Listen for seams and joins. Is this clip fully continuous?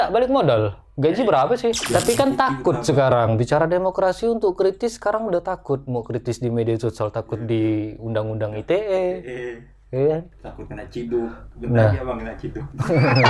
no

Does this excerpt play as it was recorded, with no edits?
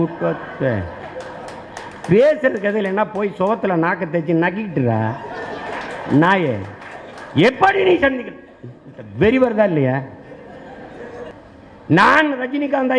no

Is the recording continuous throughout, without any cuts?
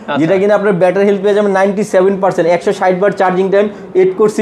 yes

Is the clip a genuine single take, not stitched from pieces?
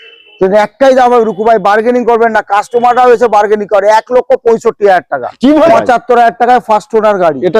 no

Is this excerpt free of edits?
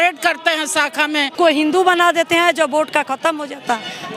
no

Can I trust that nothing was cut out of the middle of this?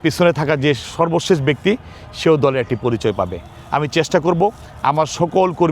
yes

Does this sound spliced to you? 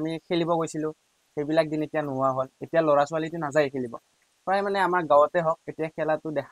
no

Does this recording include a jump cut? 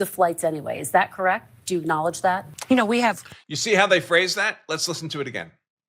no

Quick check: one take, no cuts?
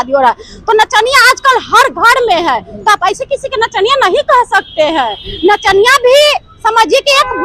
yes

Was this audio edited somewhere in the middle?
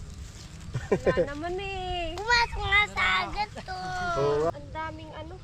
yes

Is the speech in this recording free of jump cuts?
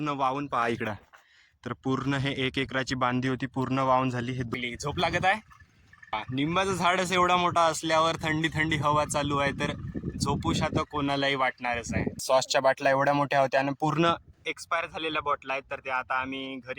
no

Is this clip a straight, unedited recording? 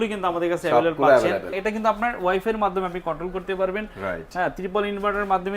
no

